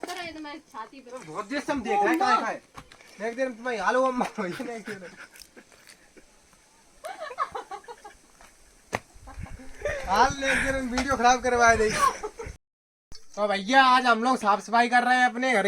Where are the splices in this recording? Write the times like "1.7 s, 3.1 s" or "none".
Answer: none